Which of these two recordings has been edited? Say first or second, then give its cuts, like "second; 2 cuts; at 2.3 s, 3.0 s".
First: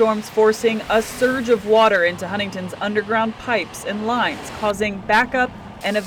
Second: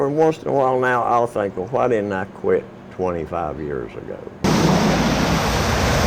second; 1 cut; at 4.6 s